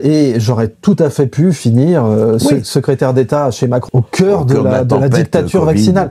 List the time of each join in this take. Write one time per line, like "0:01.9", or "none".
0:03.8